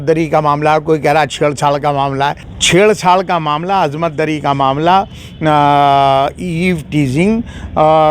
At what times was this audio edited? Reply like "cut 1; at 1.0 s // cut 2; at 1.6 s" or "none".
cut 1; at 2.5 s